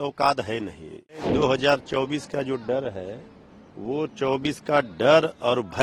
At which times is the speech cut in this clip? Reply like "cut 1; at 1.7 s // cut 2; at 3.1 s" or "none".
cut 1; at 1.2 s